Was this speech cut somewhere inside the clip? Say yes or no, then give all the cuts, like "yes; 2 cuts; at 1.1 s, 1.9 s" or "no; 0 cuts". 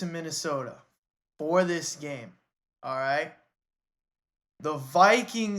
no; 0 cuts